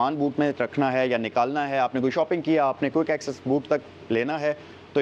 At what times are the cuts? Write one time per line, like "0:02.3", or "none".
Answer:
none